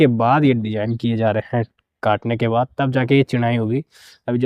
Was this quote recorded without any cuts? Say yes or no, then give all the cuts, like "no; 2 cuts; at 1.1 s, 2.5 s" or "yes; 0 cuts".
yes; 0 cuts